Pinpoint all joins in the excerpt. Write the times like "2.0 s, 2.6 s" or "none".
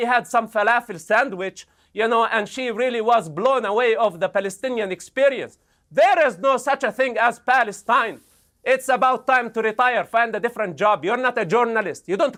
none